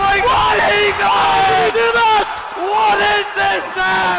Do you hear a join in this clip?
yes; 1 cut; at 1.9 s

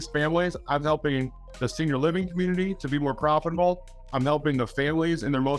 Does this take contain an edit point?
no; 0 cuts

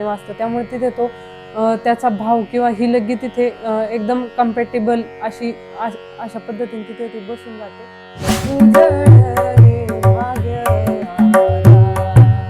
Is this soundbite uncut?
no; 1 cut; at 8.2 s

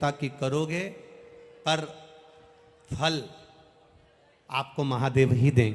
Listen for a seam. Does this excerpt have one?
no; 0 cuts

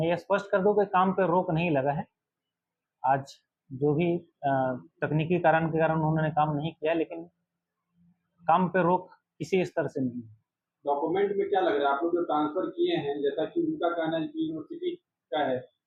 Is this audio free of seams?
yes; 0 cuts

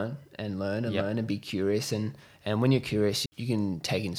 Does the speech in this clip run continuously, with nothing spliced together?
no; 1 cut; at 3.2 s

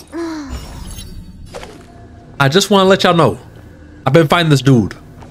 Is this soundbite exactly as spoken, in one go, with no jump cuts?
no; 1 cut; at 2.3 s

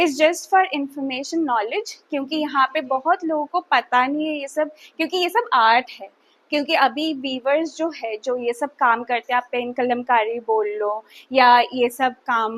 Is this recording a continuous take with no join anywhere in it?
yes; 0 cuts

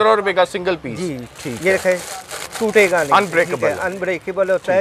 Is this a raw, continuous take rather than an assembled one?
yes; 0 cuts

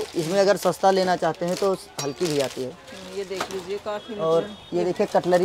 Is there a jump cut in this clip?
no; 0 cuts

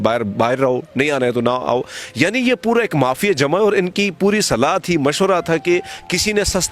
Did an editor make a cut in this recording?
no; 0 cuts

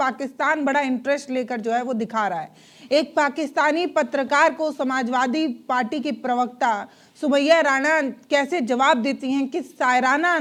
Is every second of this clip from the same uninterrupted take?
yes; 0 cuts

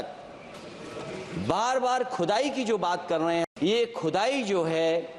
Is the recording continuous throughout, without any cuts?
no; 1 cut; at 3.5 s

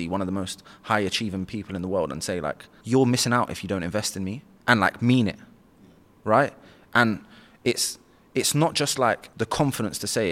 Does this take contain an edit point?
yes; 3 cuts; at 2.7 s, 4.4 s, 9.3 s

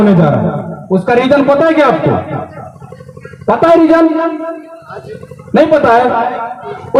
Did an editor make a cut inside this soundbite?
no; 0 cuts

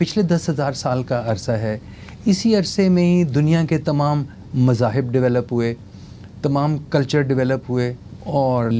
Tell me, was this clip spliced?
no; 0 cuts

